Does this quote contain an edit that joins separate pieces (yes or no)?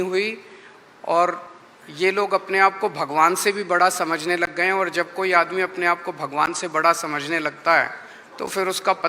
no